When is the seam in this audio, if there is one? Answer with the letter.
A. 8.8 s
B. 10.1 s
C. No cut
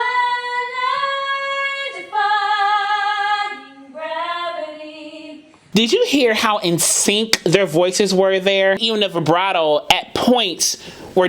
A